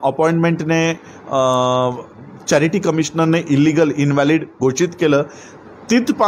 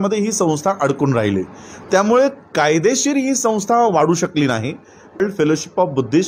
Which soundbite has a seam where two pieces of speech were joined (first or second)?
second